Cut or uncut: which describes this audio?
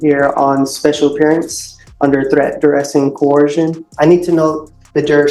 cut